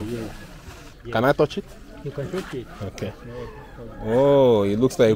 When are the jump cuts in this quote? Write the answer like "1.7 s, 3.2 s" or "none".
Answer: 0.9 s